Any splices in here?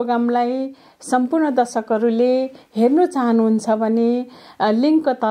no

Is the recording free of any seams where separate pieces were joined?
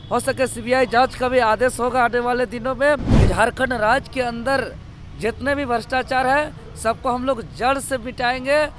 no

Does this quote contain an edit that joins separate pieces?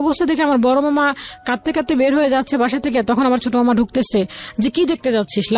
no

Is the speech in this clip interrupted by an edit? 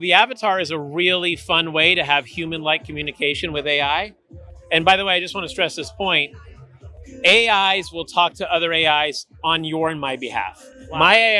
no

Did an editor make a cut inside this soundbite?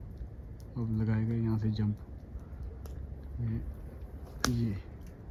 no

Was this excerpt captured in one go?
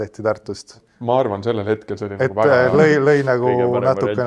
yes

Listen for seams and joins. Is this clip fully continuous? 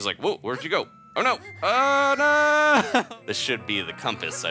no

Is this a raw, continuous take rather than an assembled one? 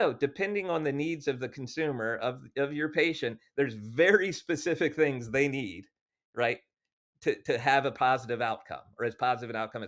yes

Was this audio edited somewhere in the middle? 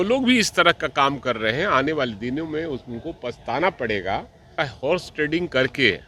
yes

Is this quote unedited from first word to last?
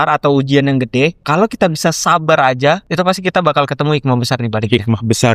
no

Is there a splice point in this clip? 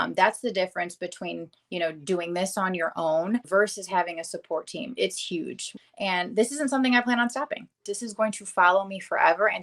yes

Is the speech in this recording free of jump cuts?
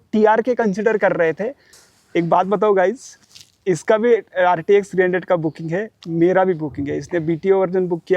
no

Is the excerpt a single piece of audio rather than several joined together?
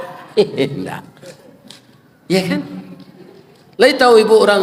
yes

